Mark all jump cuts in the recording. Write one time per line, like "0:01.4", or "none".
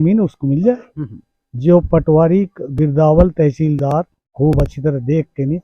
0:04.3